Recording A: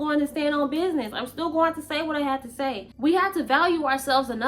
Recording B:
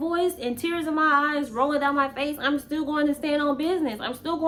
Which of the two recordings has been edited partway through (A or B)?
A